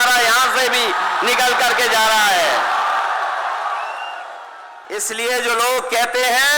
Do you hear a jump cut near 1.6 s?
no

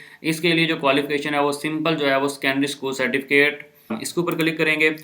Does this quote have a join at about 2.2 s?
no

